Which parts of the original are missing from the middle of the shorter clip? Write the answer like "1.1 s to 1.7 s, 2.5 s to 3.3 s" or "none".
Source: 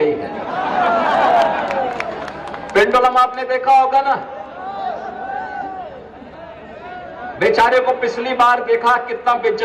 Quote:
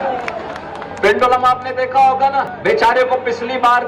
4.3 s to 7.3 s